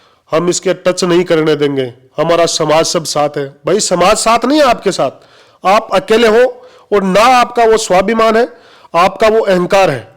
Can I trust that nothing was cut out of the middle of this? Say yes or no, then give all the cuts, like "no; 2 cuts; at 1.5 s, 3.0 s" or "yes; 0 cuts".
yes; 0 cuts